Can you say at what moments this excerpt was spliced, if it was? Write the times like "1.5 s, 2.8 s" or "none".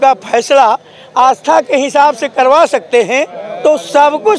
3.4 s